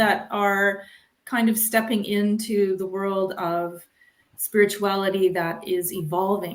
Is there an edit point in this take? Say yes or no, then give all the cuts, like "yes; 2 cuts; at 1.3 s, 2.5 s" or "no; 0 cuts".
no; 0 cuts